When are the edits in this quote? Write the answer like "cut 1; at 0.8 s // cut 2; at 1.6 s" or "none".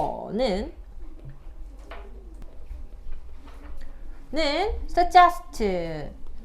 cut 1; at 2.4 s